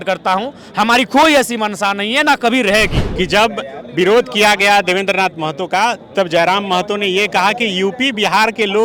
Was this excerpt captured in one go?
no; 1 cut; at 3.0 s

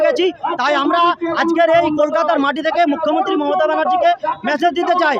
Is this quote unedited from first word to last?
yes; 0 cuts

